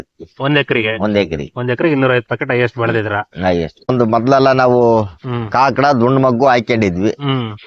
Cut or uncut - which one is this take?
cut